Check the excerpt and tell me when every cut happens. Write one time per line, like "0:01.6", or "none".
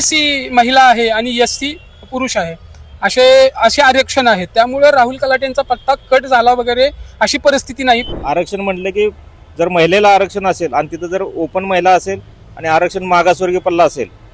0:08.1